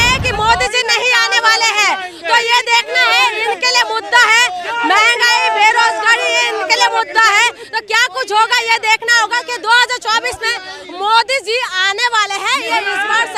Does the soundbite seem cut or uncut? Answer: uncut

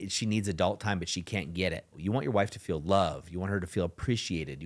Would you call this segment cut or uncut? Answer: cut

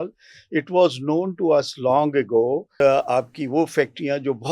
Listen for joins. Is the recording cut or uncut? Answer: cut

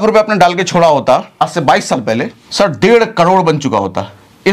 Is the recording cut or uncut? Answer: cut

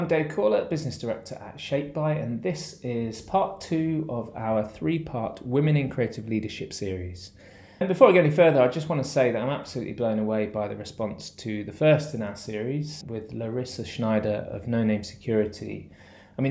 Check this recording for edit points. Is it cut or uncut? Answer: cut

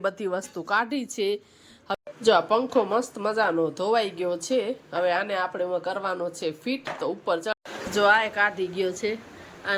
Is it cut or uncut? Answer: cut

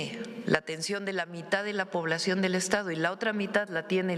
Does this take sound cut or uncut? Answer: uncut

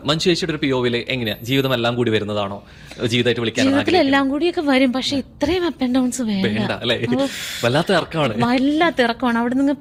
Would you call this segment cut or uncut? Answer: uncut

